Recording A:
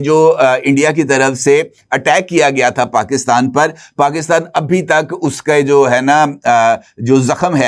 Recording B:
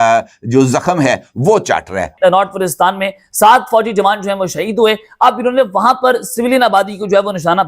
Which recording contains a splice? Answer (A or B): B